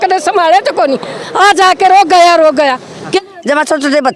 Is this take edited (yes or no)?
yes